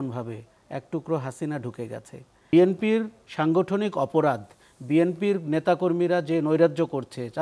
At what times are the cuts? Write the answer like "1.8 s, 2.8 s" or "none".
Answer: 2.5 s

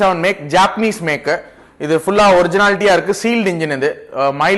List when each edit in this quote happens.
none

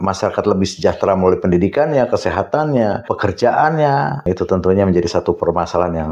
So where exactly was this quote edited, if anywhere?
3.1 s, 4.2 s

